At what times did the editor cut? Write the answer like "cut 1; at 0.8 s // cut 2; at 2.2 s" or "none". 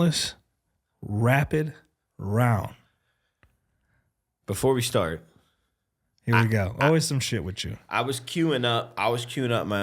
none